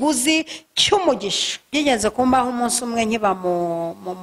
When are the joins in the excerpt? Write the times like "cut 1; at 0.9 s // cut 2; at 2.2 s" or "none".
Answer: cut 1; at 1.7 s